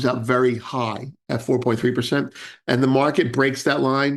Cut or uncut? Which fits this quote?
uncut